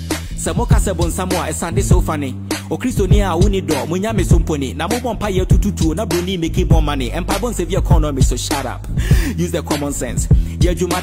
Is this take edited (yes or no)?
no